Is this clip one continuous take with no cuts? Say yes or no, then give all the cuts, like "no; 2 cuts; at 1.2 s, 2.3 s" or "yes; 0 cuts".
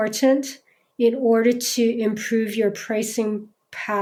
yes; 0 cuts